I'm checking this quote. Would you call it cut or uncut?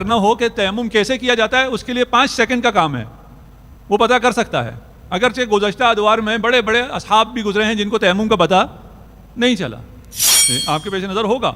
uncut